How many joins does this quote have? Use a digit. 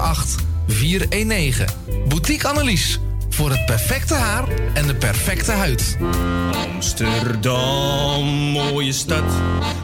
1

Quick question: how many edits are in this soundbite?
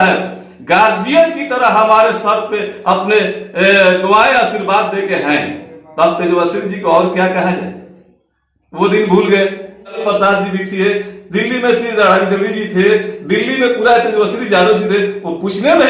1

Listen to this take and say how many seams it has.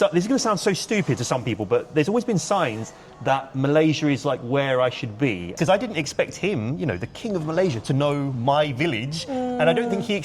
1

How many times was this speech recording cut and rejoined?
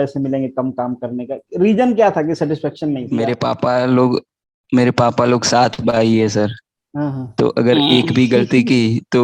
1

